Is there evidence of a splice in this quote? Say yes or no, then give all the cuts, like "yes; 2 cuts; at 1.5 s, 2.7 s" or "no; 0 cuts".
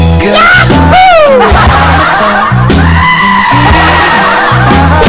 no; 0 cuts